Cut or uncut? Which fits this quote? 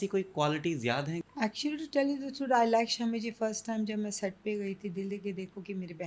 cut